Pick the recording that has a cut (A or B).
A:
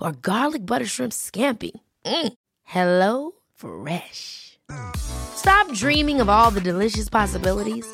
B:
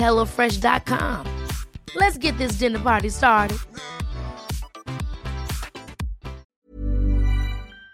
B